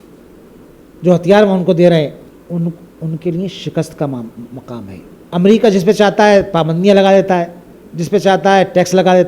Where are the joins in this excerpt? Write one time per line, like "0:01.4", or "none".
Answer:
0:02.3
0:05.1